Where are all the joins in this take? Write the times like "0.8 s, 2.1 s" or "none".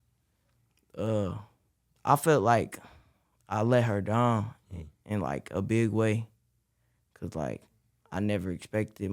1.9 s